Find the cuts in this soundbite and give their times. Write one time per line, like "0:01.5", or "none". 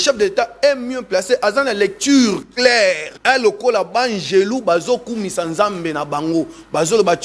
0:03.1

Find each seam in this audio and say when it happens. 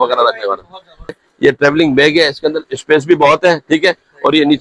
0:01.2

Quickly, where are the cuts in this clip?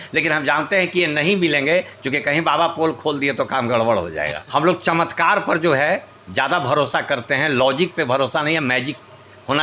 0:04.4

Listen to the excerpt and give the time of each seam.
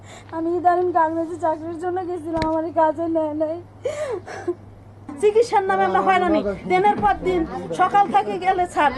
0:05.0

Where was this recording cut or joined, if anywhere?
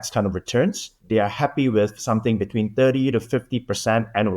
0:00.9

